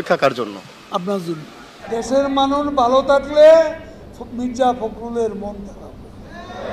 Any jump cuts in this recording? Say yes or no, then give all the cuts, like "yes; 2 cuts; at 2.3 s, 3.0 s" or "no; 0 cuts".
no; 0 cuts